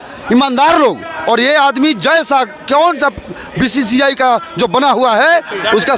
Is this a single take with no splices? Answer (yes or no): yes